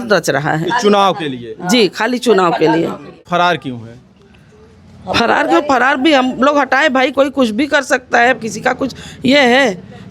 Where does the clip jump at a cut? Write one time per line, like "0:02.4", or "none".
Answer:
0:03.3